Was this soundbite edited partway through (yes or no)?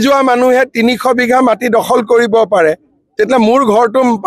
no